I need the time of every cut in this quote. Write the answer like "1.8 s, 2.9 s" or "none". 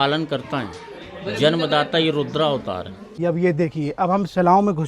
3.2 s